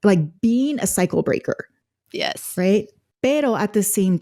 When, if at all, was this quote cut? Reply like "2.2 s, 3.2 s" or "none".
none